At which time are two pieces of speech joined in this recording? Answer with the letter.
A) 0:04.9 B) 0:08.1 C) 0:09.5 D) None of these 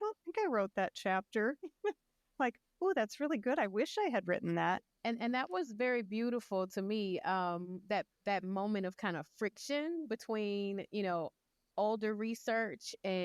A